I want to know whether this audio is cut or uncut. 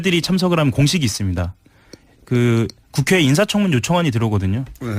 cut